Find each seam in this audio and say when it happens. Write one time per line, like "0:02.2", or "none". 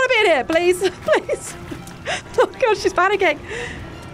none